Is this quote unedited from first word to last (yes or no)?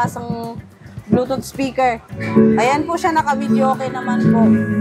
no